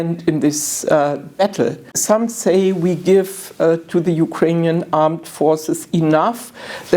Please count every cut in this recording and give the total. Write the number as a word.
one